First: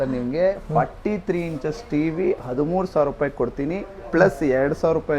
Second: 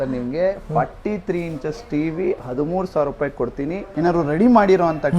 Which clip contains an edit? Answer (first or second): second